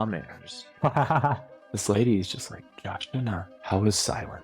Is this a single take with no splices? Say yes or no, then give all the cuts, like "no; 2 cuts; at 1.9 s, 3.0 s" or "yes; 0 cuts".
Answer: no; 2 cuts; at 1.8 s, 3.5 s